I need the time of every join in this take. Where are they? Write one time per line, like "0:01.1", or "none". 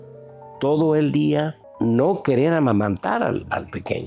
0:01.6